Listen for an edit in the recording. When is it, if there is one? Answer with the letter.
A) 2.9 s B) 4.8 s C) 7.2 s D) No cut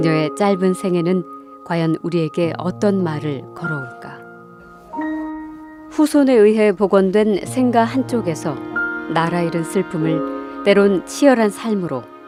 D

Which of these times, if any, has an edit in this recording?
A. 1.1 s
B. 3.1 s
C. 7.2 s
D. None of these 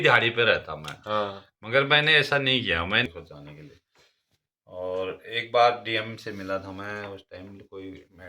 B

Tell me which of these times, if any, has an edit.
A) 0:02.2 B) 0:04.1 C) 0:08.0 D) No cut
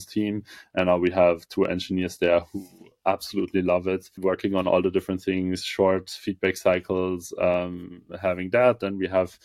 B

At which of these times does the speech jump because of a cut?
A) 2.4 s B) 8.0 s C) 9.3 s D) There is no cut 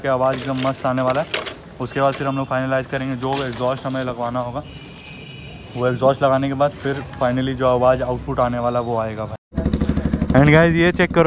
C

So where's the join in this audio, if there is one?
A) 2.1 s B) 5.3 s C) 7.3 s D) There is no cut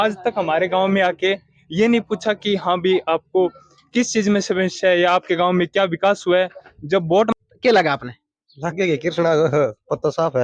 C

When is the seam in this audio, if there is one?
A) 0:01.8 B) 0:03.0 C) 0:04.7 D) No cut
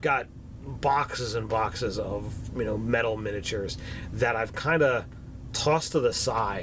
A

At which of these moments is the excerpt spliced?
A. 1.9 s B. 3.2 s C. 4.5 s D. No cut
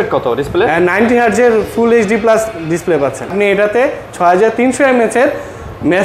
B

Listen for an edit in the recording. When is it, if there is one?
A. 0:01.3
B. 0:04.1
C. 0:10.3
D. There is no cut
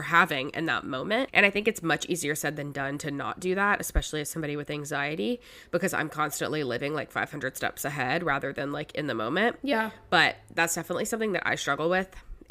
A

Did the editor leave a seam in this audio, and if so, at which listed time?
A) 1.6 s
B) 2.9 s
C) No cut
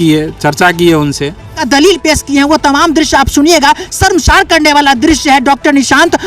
A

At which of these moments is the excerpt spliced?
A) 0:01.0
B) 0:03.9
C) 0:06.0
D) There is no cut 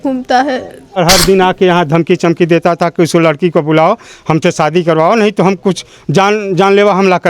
A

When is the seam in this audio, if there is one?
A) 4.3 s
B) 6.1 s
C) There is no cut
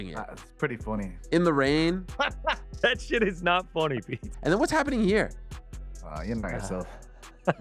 A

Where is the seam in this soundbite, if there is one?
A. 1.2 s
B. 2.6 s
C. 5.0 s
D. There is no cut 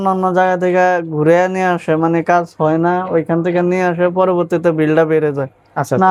D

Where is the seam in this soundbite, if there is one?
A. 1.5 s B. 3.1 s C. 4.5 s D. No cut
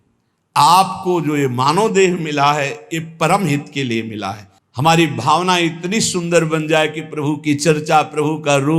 C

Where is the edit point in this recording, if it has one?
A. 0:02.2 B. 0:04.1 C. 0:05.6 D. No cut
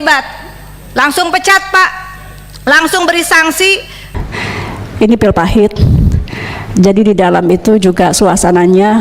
B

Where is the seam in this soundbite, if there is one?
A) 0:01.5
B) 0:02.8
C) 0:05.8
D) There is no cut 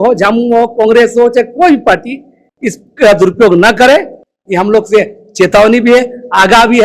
D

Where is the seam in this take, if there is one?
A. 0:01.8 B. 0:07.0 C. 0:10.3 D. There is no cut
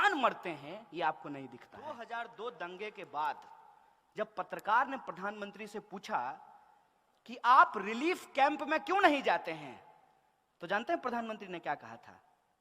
A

